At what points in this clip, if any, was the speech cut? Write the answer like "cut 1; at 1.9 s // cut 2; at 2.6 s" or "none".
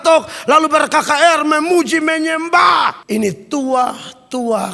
cut 1; at 3.0 s